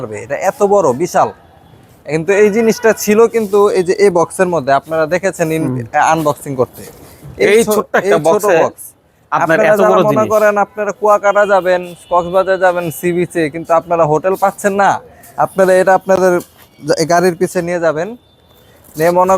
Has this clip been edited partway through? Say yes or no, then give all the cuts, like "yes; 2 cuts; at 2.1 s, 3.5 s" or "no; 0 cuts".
no; 0 cuts